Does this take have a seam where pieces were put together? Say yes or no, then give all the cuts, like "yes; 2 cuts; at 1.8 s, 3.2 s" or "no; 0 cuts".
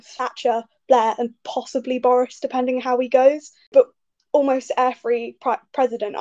yes; 1 cut; at 3.7 s